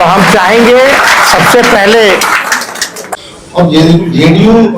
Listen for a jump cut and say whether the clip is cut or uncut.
cut